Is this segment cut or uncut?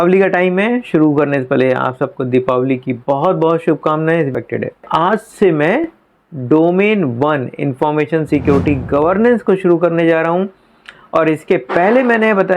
cut